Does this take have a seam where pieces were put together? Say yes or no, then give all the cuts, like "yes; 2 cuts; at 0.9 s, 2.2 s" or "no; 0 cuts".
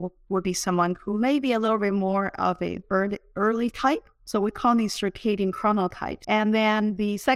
yes; 2 cuts; at 4.1 s, 6.1 s